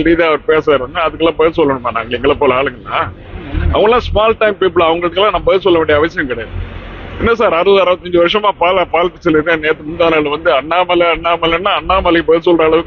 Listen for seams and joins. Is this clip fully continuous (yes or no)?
yes